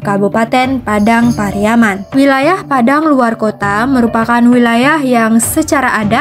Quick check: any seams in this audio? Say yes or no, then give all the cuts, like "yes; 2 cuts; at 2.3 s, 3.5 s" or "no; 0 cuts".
yes; 1 cut; at 2.0 s